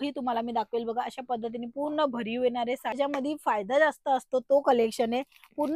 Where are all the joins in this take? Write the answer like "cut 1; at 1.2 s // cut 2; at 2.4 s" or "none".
cut 1; at 3.0 s